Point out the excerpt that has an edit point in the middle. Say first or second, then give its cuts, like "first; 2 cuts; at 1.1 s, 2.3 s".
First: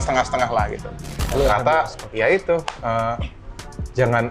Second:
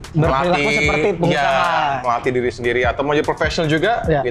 first; 1 cut; at 1.2 s